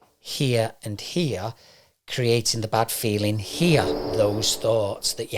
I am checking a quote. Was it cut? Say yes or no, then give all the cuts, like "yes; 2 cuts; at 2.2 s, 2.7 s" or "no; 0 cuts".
yes; 1 cut; at 4.0 s